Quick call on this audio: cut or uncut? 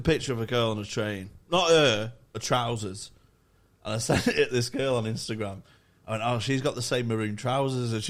uncut